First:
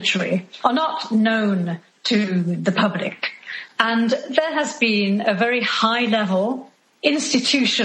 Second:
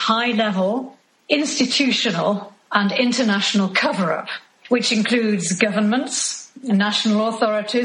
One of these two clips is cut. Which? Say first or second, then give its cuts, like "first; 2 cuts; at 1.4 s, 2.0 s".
first; 1 cut; at 3.5 s